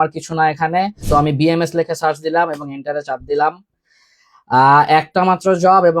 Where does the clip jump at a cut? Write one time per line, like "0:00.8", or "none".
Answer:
0:01.0